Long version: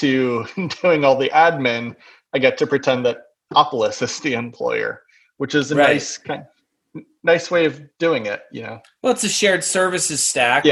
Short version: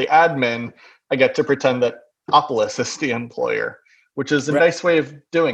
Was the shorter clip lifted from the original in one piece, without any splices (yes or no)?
no